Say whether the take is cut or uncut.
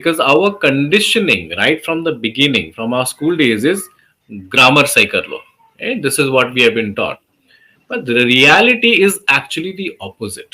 cut